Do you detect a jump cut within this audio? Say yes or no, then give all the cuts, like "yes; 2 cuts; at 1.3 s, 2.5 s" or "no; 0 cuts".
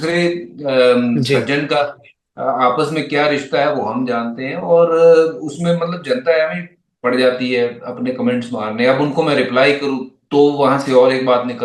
no; 0 cuts